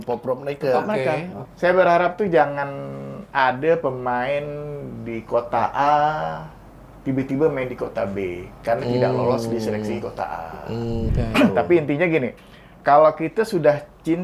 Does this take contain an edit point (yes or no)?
yes